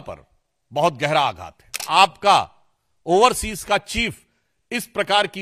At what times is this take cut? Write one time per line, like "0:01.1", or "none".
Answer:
0:01.8